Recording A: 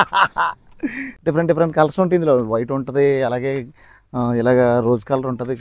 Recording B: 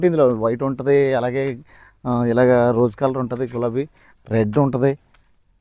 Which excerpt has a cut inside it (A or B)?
A